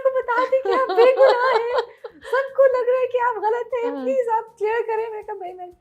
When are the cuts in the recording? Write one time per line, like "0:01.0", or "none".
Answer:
none